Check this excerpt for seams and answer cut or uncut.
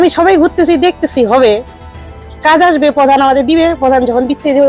uncut